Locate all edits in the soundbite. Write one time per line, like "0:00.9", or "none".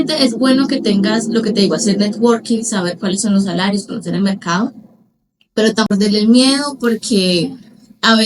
0:05.9